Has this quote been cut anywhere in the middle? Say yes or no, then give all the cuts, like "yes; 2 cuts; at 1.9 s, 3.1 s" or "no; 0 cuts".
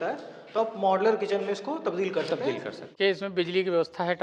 yes; 1 cut; at 2.9 s